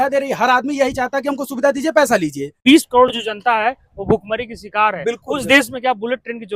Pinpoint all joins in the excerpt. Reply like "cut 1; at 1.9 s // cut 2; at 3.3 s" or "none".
cut 1; at 2.6 s